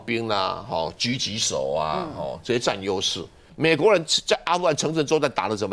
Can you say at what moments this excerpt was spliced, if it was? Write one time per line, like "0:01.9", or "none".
0:03.4